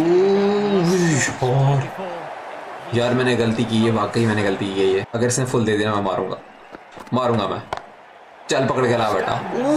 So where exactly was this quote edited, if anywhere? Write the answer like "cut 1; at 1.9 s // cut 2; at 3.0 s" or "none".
cut 1; at 2.8 s // cut 2; at 5.1 s